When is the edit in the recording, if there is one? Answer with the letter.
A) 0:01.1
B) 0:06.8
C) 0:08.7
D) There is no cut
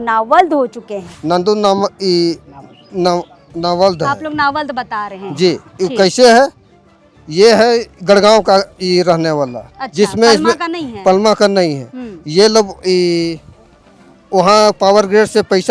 A